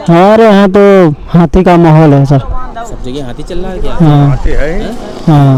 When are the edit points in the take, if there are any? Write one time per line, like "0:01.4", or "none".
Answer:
none